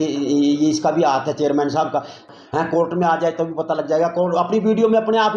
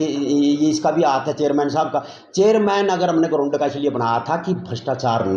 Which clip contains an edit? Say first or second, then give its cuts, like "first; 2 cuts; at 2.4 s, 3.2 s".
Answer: first; 1 cut; at 2.3 s